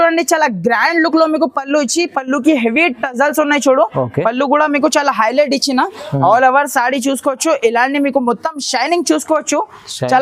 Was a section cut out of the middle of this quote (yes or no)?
no